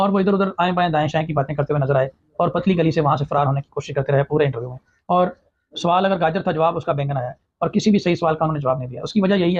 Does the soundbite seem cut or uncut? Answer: uncut